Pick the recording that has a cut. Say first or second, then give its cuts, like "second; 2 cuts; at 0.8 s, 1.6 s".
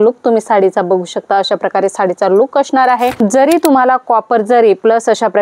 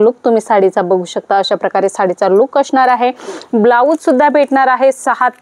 first; 1 cut; at 3.1 s